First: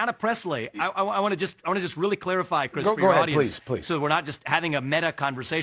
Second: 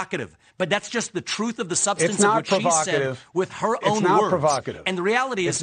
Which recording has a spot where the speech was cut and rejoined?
first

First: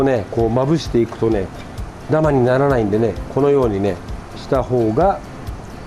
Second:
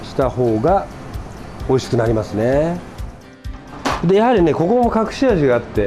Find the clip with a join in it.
second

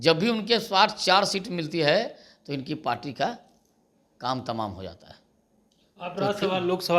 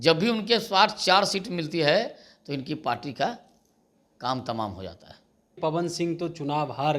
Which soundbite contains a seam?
second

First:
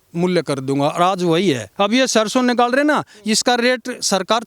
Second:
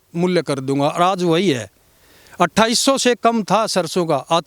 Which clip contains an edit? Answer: first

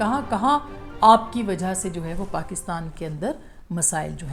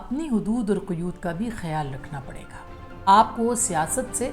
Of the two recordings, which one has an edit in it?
second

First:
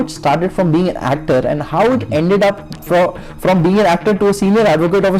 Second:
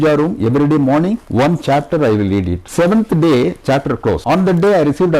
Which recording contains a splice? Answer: second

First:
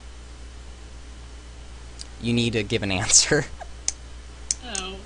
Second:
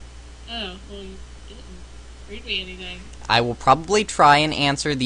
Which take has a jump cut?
first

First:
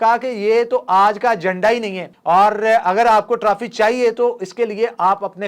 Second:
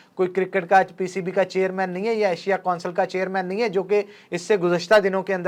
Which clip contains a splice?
first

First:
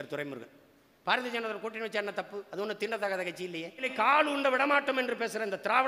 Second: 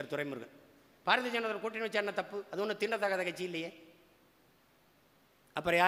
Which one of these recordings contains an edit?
first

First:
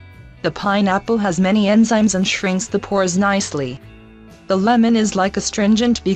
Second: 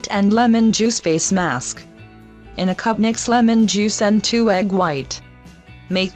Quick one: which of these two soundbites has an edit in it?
first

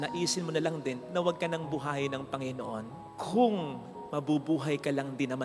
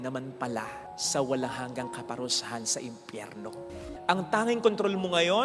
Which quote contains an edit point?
second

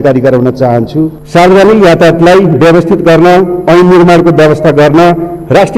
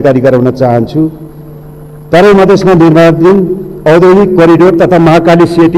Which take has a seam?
first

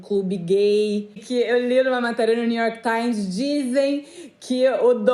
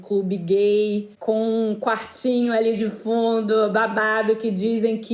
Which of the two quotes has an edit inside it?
first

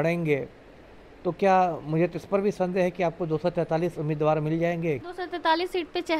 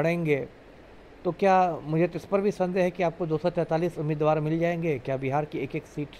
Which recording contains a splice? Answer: first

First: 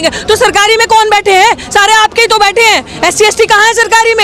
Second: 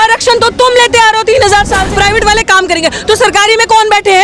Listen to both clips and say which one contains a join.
second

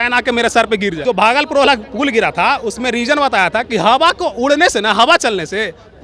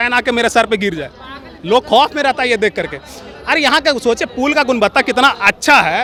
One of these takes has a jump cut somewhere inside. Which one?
first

